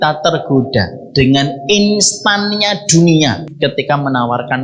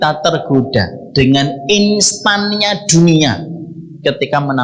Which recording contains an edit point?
first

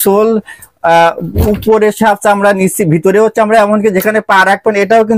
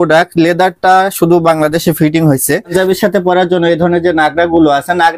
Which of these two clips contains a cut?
second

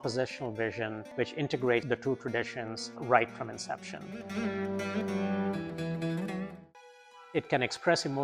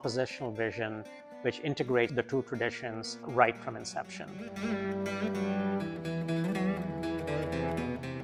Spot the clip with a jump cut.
first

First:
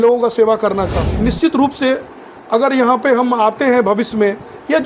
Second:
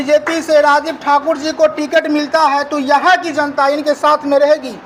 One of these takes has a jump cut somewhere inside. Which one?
first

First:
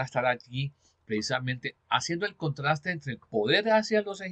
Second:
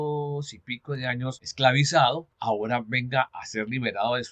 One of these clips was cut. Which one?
second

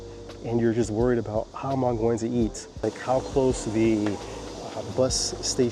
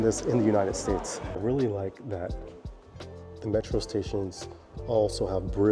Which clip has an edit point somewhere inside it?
first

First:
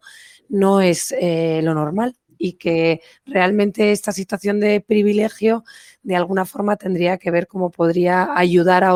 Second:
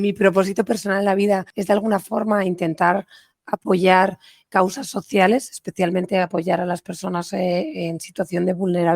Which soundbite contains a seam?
second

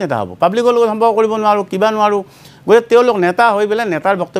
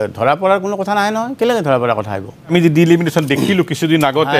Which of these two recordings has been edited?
second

